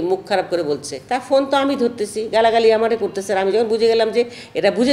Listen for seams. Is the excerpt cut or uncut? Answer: cut